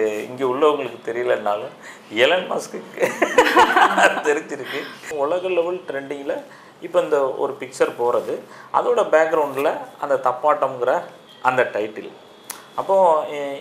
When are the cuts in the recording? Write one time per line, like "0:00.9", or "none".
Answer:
0:05.0